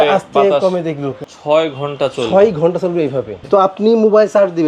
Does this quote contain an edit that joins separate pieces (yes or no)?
yes